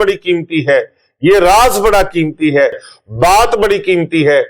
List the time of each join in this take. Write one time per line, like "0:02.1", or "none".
0:02.9